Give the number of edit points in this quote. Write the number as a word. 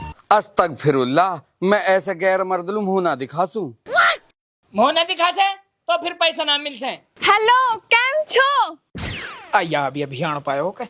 one